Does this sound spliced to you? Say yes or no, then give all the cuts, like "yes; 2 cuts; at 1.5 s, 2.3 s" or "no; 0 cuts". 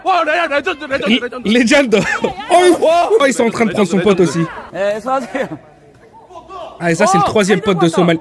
yes; 2 cuts; at 3.2 s, 4.6 s